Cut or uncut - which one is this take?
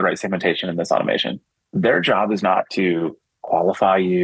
uncut